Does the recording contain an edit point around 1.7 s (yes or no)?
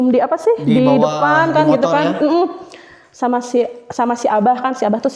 no